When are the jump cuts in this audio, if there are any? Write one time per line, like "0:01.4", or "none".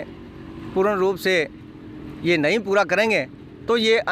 none